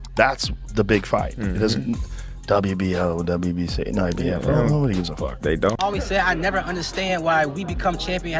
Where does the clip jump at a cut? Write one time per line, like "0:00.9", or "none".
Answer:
0:05.4